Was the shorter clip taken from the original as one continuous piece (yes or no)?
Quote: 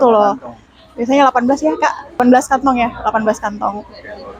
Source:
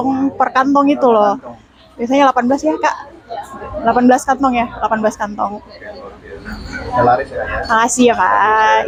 no